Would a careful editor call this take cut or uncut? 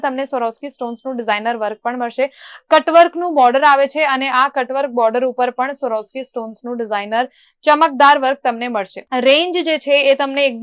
uncut